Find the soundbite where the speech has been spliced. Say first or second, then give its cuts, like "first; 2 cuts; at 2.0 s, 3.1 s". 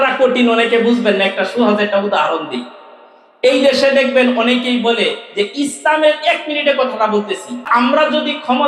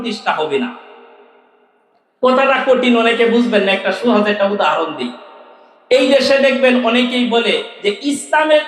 first; 1 cut; at 7.7 s